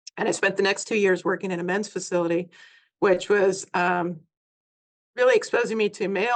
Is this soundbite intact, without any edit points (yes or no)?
yes